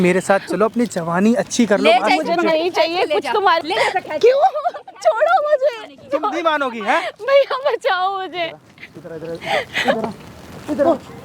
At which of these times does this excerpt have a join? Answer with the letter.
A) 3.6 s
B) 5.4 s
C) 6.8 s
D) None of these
A